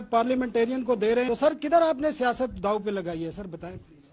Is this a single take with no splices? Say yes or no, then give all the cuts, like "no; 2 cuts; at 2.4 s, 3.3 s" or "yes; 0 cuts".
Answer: no; 1 cut; at 1.3 s